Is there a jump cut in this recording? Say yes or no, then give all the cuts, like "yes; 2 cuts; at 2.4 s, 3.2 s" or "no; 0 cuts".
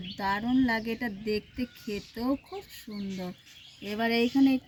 no; 0 cuts